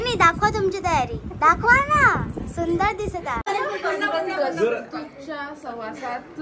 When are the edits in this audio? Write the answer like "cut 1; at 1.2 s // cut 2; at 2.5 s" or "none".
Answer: cut 1; at 3.4 s